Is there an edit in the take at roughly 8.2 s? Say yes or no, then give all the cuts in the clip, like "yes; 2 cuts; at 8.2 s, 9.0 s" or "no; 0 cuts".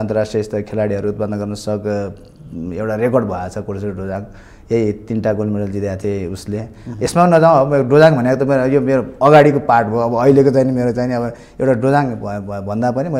no; 0 cuts